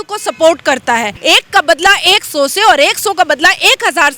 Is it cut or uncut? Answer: cut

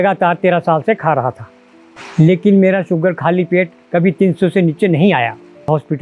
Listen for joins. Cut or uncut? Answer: uncut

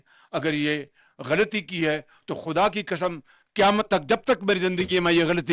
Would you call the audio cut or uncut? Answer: uncut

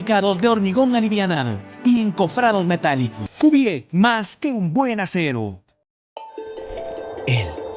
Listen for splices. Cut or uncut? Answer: cut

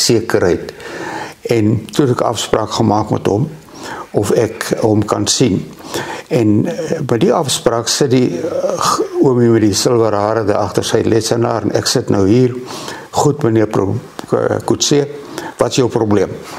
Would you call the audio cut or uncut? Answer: uncut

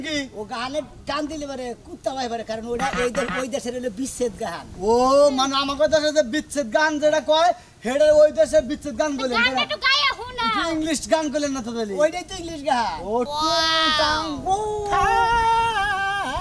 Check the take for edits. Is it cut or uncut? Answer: uncut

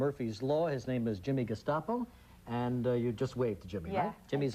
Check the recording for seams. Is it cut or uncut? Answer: uncut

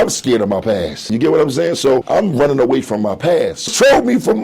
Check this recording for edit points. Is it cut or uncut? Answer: cut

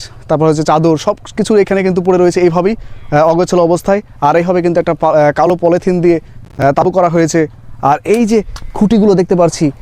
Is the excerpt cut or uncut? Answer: uncut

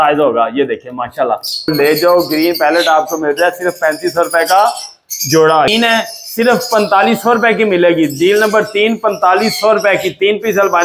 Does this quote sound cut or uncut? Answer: cut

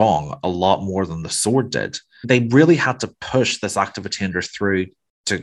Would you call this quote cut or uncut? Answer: cut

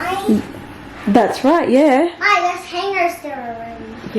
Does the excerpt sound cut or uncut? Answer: uncut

